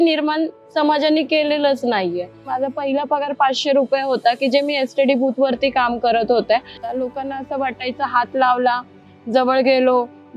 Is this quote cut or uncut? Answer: cut